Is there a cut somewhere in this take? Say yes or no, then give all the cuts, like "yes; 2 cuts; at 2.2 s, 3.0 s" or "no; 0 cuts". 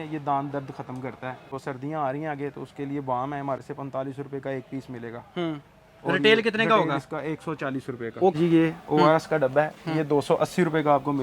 yes; 3 cuts; at 1.5 s, 3.6 s, 8.3 s